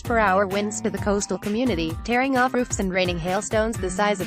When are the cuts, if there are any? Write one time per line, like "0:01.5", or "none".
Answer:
0:02.9